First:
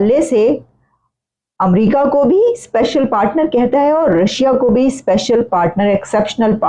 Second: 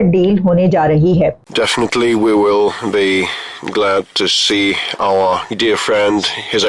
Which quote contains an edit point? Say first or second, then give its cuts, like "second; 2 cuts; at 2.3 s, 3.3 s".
second; 1 cut; at 1.4 s